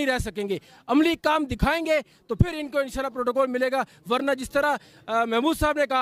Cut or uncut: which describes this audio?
uncut